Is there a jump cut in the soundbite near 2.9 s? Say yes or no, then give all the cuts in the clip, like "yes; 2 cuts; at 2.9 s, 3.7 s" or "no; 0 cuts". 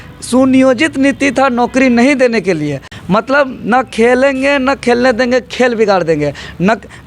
yes; 1 cut; at 2.9 s